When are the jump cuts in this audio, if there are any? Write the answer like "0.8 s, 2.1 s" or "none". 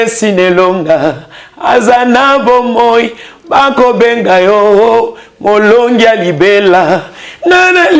none